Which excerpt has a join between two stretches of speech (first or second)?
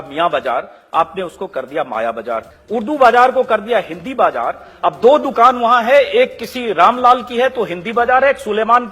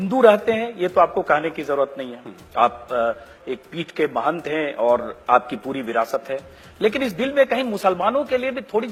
first